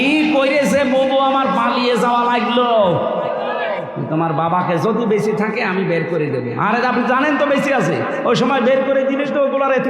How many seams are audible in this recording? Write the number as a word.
one